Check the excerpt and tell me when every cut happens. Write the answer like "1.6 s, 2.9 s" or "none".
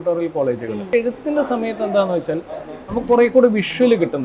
0.9 s